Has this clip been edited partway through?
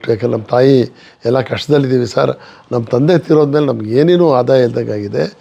no; 0 cuts

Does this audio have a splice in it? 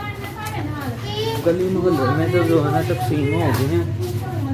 no; 0 cuts

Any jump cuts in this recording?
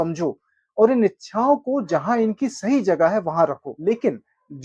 yes; 1 cut; at 3.7 s

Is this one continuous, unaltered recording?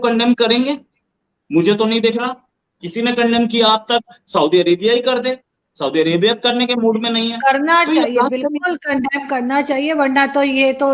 yes; 0 cuts

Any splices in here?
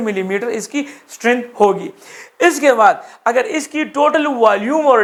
no; 0 cuts

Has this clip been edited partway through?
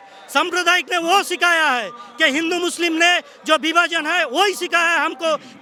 no; 0 cuts

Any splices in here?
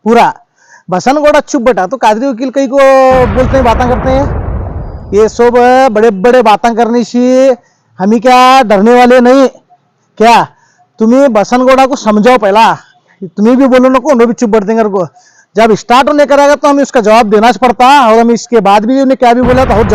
no; 0 cuts

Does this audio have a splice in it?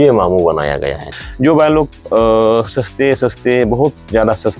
yes; 1 cut; at 1.0 s

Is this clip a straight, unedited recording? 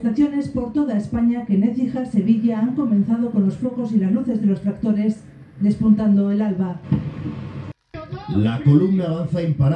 no; 1 cut; at 7.9 s

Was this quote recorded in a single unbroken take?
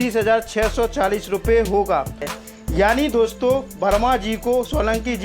no; 1 cut; at 2.3 s

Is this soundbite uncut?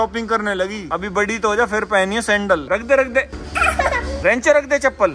yes; 0 cuts

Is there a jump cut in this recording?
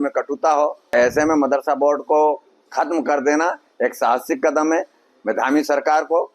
yes; 1 cut; at 0.9 s

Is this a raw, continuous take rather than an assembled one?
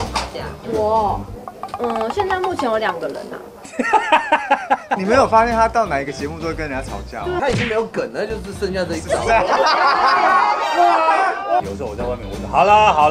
no; 3 cuts; at 5.0 s, 7.4 s, 11.6 s

